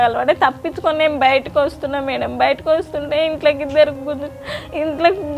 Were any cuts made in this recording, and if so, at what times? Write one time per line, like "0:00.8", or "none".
none